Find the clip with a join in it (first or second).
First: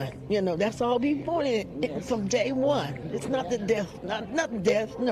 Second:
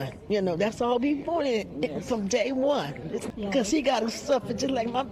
second